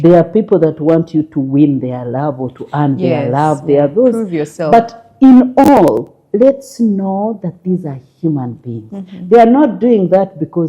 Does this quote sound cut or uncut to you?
uncut